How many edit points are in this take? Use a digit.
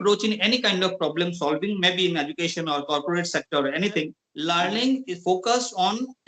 1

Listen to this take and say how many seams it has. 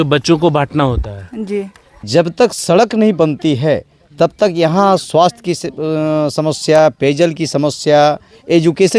1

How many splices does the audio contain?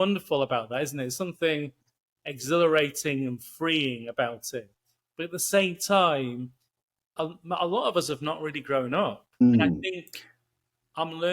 1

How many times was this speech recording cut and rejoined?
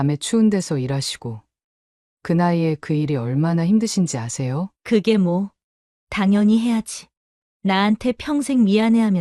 1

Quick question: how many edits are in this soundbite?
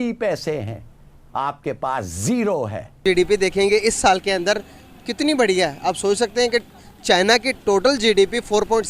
1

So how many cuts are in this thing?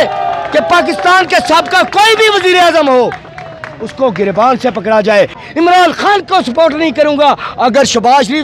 1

